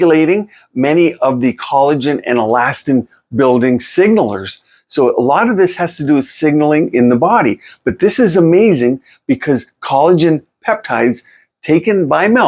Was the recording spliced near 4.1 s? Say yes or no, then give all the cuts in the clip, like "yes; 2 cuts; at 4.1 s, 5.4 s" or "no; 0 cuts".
no; 0 cuts